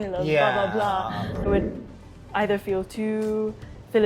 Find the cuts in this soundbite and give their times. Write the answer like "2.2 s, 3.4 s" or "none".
1.4 s